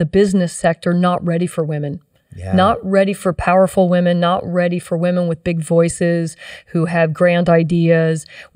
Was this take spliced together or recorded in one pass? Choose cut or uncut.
uncut